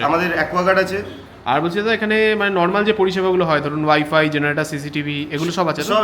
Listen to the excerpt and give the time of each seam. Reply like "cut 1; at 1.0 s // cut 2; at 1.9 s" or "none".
cut 1; at 1.1 s